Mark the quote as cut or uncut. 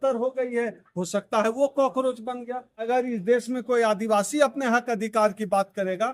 cut